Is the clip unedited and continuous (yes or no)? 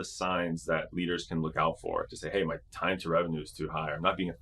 yes